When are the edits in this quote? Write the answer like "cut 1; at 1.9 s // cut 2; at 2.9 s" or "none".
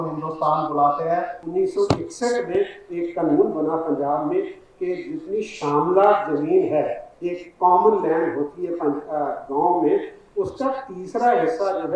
cut 1; at 1.4 s